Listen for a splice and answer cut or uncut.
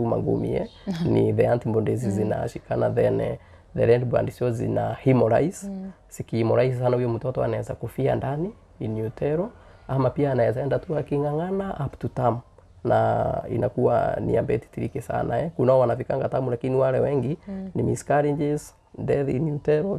uncut